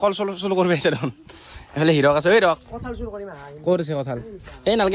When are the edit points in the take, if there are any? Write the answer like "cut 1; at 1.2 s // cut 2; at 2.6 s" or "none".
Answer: none